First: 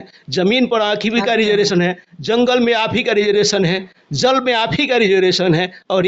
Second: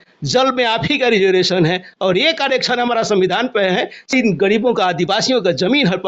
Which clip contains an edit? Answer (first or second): second